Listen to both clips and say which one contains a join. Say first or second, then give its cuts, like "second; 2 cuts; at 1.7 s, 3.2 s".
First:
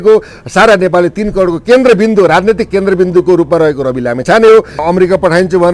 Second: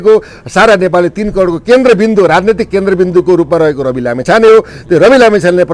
first; 1 cut; at 4.8 s